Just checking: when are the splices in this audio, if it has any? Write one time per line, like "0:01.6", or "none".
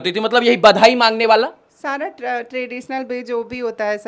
none